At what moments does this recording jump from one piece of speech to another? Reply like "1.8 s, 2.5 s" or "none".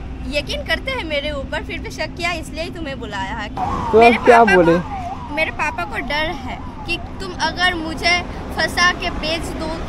3.5 s